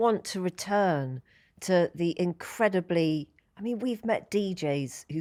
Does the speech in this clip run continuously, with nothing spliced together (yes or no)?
yes